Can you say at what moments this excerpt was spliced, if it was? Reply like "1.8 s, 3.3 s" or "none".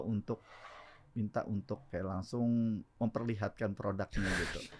1.9 s, 2.9 s

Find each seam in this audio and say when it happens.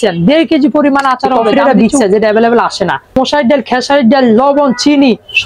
1.4 s, 3.2 s

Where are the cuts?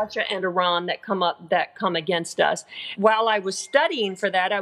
2.9 s

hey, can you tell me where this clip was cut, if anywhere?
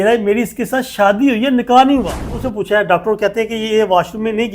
2.4 s

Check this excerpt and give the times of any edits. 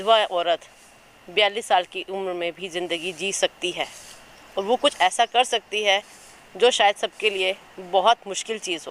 none

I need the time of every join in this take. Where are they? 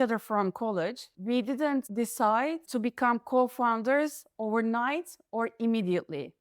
1.1 s, 1.9 s, 2.6 s

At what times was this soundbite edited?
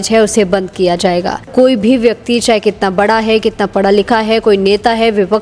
1.5 s

